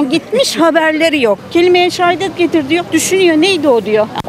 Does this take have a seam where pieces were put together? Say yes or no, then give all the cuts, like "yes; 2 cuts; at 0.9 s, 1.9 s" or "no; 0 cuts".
yes; 1 cut; at 1.4 s